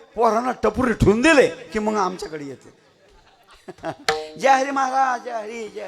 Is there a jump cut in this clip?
no; 0 cuts

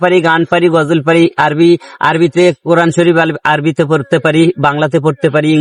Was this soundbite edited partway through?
no; 0 cuts

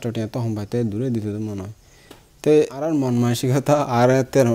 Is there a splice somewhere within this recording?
yes; 1 cut; at 2.9 s

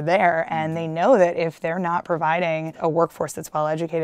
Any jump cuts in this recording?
yes; 1 cut; at 2.7 s

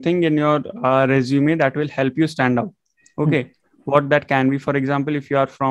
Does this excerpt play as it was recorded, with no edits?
yes; 0 cuts

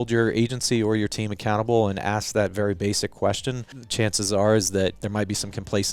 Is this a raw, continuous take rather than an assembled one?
no; 2 cuts; at 3.8 s, 5.0 s

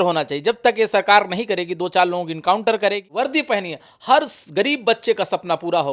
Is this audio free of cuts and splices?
no; 1 cut; at 3.1 s

